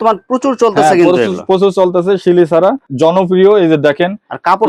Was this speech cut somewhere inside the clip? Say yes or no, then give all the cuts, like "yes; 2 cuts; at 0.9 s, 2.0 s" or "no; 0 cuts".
no; 0 cuts